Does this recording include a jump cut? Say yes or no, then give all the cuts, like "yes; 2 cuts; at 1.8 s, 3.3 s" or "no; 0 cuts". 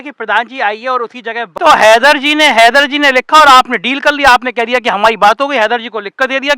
yes; 1 cut; at 1.5 s